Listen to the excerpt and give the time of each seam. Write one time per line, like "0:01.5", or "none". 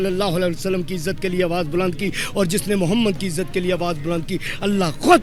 none